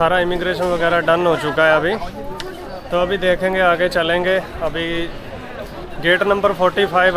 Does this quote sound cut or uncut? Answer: uncut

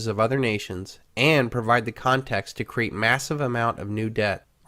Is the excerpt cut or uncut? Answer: uncut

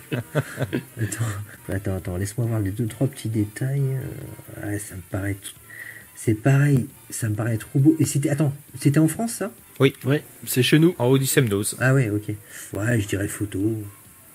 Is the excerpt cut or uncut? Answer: uncut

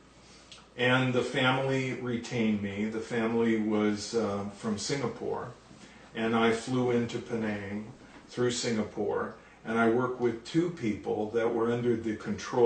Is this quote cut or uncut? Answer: uncut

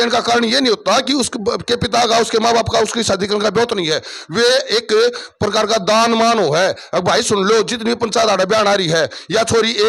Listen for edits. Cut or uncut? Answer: uncut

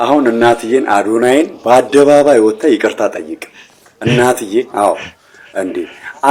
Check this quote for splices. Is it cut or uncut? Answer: uncut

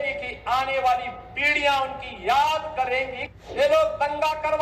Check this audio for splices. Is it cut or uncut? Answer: cut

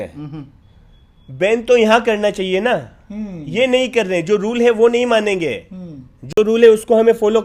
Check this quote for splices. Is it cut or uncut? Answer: uncut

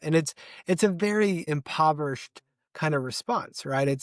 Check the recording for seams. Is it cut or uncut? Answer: cut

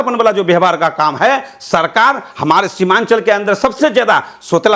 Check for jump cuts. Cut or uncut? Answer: uncut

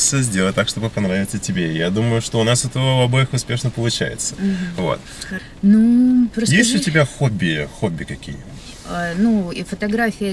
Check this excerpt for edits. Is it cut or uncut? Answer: uncut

